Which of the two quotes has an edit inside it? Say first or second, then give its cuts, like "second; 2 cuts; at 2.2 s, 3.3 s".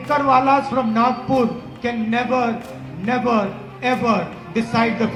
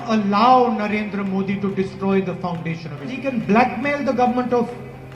second; 1 cut; at 3.2 s